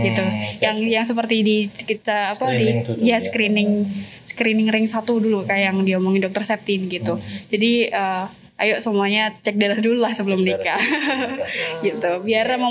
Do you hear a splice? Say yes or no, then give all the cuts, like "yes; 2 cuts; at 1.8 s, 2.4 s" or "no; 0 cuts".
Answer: no; 0 cuts